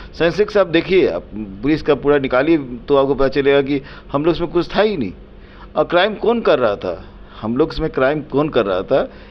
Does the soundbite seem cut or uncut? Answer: uncut